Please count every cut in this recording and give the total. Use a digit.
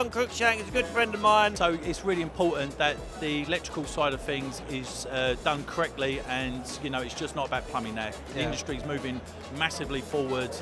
1